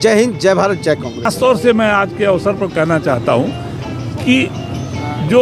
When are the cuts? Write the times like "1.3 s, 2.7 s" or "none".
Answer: 1.3 s